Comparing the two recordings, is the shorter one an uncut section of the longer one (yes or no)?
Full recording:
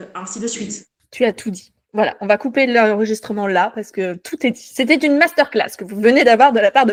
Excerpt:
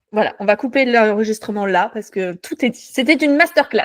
yes